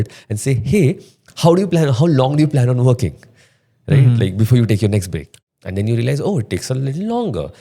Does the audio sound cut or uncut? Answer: cut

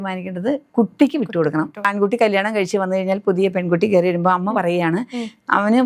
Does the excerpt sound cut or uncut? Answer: cut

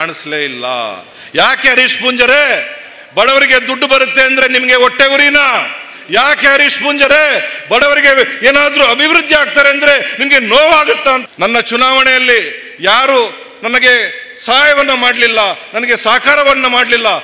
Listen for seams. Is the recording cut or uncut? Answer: cut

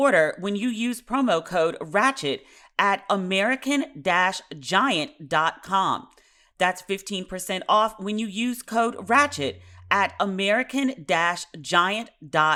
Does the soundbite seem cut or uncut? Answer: uncut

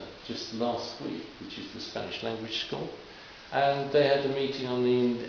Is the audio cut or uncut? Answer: cut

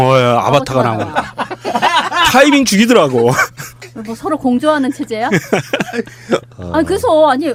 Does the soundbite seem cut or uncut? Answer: uncut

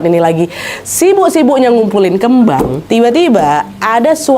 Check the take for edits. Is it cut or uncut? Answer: cut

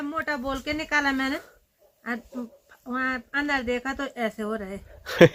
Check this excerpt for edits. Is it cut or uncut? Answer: uncut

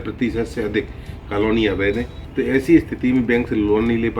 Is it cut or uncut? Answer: cut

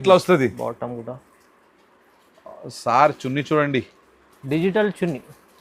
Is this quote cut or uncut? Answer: uncut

